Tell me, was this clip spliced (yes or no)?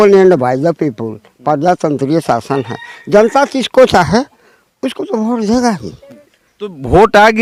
no